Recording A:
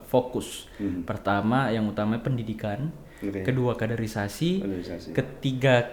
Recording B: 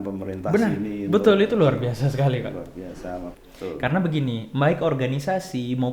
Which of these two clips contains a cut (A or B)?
B